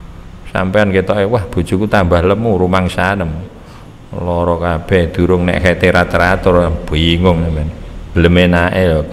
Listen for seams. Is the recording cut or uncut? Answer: cut